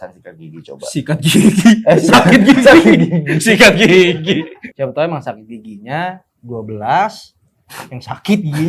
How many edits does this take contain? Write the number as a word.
one